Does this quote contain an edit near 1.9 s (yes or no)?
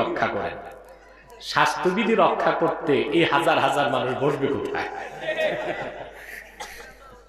no